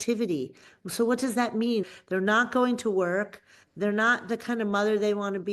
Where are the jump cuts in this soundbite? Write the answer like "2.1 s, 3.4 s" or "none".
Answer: 1.9 s